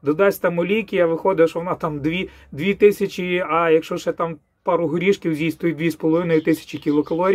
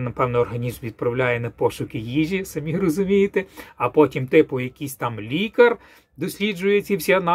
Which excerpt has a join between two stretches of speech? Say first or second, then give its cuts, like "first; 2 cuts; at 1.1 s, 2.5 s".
second; 1 cut; at 3.6 s